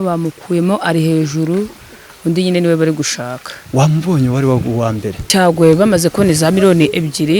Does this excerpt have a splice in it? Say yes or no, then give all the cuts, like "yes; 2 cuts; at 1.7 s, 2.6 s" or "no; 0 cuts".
yes; 1 cut; at 5.1 s